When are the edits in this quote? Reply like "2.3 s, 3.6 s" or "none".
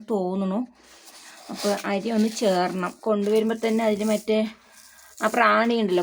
none